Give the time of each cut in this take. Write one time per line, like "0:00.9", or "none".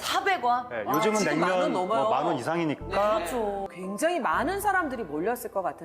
0:03.6